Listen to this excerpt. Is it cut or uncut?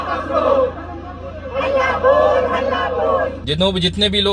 cut